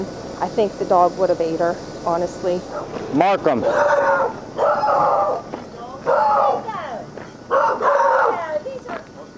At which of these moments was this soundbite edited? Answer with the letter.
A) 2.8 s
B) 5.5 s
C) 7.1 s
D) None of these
A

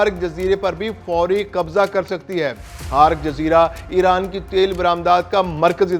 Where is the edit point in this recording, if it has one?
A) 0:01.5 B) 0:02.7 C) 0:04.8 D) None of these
B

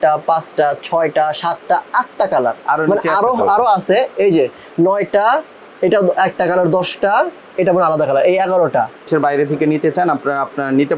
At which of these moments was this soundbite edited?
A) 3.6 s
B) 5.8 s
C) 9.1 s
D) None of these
C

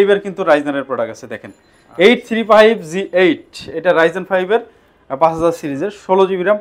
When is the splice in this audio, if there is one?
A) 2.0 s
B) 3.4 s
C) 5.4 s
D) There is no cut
D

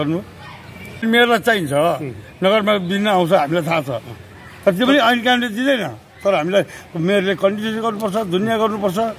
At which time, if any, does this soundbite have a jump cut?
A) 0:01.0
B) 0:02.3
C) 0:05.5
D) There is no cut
A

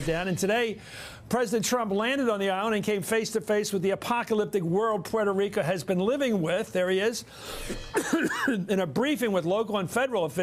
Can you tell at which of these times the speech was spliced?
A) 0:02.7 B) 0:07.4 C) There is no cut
B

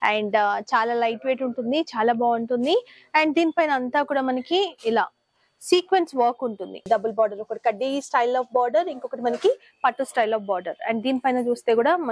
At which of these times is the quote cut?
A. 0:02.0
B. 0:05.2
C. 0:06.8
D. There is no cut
C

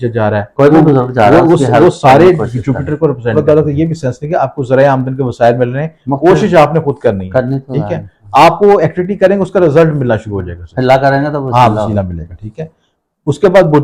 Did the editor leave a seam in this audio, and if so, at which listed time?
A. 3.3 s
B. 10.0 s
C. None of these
A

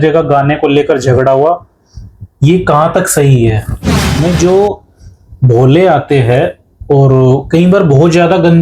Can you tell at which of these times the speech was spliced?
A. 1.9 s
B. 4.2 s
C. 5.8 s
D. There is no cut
B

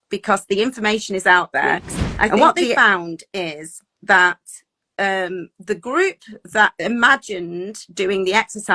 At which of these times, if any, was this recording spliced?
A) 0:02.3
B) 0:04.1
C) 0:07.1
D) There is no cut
A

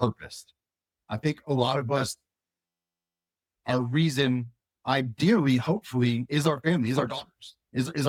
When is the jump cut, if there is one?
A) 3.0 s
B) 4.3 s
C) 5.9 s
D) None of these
D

